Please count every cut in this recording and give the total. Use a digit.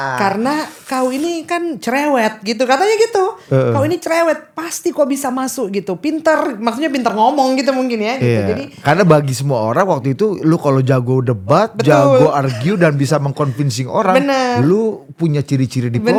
0